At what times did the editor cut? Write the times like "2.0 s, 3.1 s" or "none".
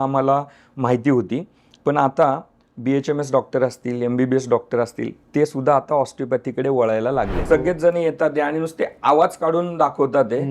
7.4 s